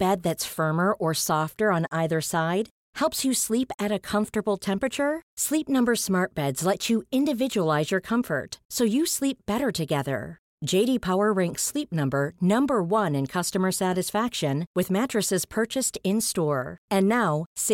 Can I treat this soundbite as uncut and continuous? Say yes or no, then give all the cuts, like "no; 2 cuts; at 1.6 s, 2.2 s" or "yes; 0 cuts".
yes; 0 cuts